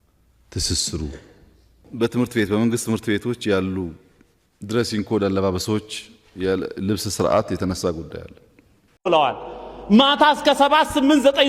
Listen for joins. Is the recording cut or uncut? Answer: cut